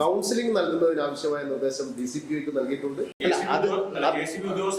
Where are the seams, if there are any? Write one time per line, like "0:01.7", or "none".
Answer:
0:03.1